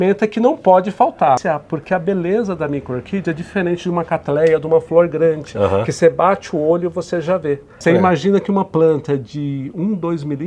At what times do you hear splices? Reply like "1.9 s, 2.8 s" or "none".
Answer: 1.4 s, 7.7 s